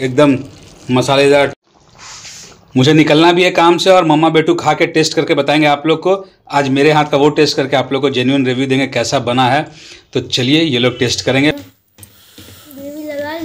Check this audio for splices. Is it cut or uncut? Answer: cut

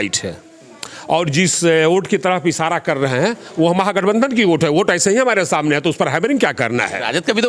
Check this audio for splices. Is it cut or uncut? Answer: uncut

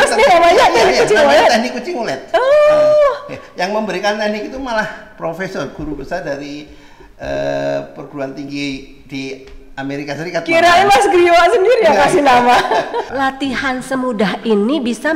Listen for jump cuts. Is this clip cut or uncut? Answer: cut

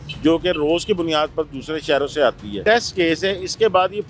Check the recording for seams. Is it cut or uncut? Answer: cut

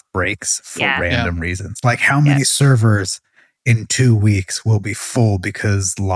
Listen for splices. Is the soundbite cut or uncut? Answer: uncut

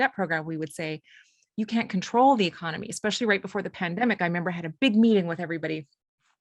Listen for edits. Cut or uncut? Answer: uncut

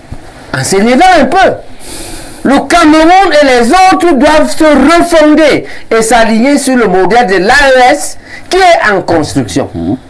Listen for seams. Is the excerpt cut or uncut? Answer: uncut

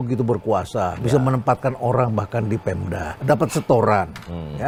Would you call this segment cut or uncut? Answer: uncut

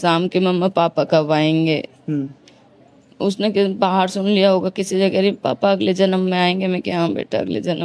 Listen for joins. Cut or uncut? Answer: uncut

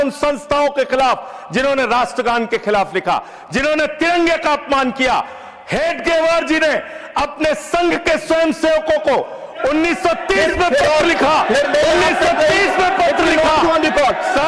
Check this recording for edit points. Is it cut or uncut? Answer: uncut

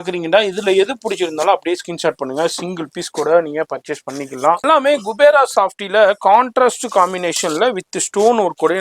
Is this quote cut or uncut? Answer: cut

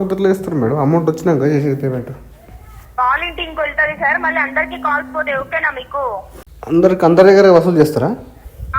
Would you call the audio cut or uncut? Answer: uncut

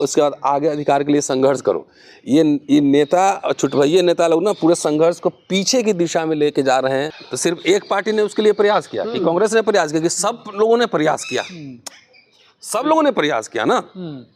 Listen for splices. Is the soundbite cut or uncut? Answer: cut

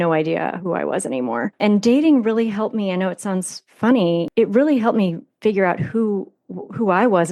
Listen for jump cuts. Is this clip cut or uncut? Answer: cut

